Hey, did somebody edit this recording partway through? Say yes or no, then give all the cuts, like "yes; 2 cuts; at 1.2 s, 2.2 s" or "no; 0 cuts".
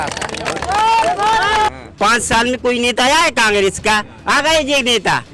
yes; 1 cut; at 1.7 s